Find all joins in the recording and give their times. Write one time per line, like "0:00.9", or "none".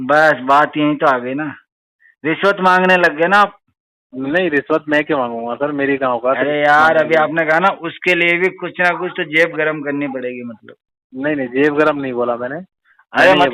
none